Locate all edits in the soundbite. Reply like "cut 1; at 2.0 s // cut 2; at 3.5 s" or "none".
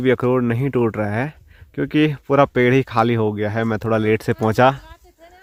none